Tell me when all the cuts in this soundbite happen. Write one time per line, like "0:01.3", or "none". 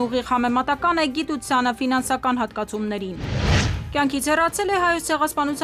none